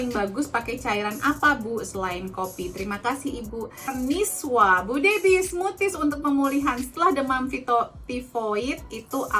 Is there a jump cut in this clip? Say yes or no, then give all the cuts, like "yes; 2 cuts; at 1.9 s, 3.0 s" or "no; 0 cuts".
yes; 1 cut; at 4.2 s